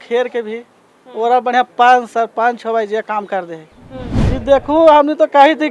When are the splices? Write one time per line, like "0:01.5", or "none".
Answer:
0:04.1